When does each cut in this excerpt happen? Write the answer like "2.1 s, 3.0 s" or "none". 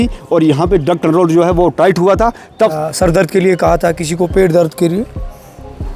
2.7 s